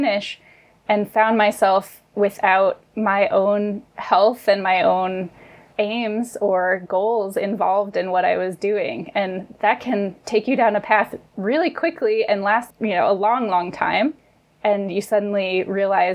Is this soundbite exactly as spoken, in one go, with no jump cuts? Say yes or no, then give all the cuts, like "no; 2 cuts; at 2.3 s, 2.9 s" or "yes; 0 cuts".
no; 1 cut; at 2.9 s